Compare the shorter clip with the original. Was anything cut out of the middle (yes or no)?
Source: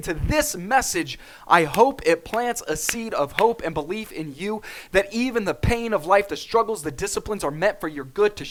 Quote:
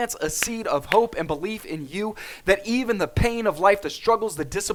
no